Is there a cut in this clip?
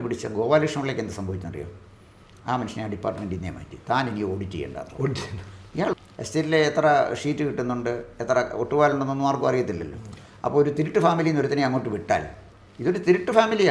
yes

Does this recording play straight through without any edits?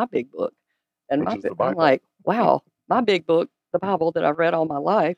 no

